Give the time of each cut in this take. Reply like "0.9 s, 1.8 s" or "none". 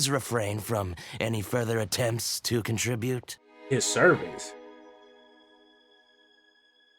3.4 s